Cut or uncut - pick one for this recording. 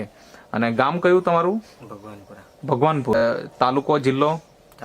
cut